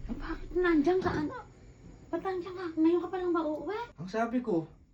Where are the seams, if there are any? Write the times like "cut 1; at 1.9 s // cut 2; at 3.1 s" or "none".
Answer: cut 1; at 3.9 s